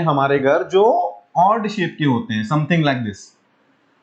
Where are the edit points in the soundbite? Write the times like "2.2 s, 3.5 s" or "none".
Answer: none